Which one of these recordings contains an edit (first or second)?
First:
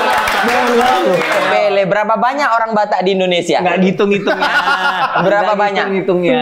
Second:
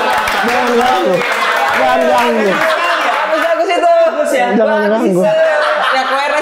first